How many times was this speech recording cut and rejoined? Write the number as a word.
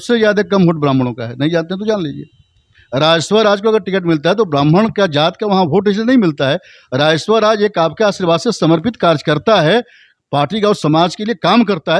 zero